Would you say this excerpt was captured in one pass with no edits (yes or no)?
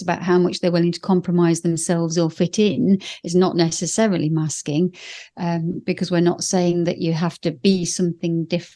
yes